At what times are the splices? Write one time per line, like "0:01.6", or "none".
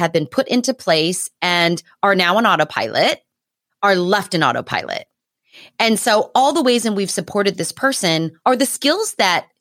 0:08.3